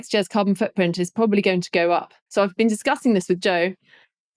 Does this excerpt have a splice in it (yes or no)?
yes